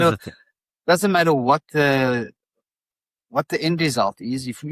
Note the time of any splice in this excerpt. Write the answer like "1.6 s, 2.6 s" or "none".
none